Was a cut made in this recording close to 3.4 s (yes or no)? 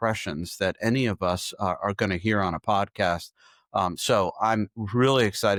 no